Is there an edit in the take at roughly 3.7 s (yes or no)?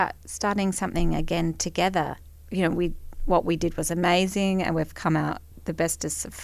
no